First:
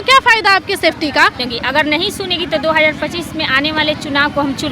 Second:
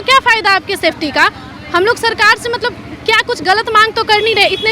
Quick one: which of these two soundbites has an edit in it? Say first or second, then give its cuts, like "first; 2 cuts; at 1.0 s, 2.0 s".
first; 1 cut; at 1.5 s